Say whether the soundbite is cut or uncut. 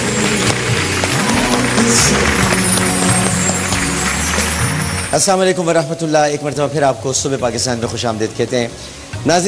uncut